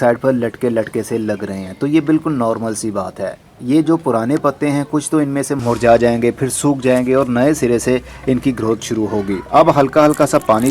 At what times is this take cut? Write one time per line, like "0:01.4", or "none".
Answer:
none